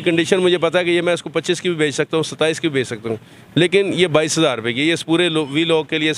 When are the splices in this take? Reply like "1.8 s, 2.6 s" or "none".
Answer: none